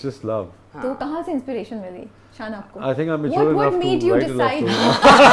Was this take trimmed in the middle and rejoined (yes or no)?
no